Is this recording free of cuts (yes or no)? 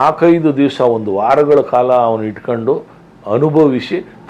yes